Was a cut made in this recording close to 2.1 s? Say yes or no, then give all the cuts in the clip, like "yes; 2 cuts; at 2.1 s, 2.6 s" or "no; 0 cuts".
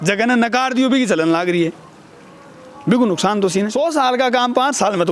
no; 1 cut; at 3.7 s